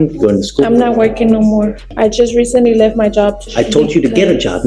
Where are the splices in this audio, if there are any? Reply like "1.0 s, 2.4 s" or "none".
1.8 s, 3.4 s